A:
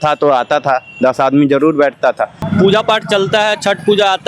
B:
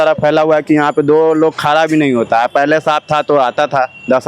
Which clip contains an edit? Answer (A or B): A